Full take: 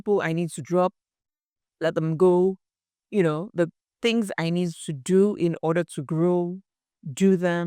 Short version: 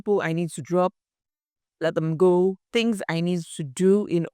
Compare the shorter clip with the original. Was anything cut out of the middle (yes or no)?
yes